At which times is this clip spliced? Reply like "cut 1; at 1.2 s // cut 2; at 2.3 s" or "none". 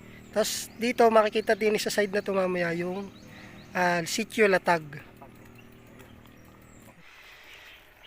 cut 1; at 6.9 s